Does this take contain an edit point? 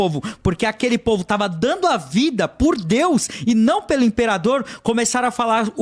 no; 0 cuts

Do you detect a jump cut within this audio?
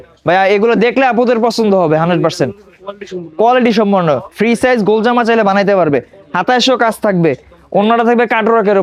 no; 0 cuts

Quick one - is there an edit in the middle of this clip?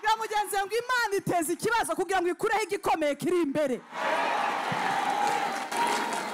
no; 0 cuts

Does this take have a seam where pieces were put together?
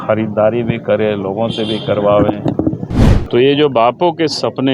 yes; 1 cut; at 2.9 s

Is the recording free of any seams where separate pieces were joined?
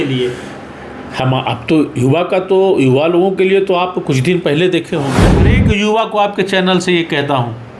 no; 1 cut; at 5.5 s

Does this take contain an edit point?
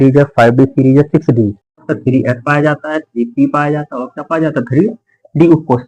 yes; 1 cut; at 1.8 s

